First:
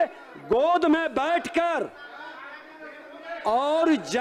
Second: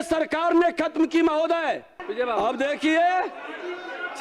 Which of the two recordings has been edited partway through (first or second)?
second